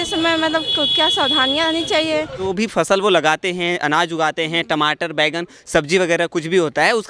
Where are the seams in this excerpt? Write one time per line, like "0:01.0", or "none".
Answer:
0:02.5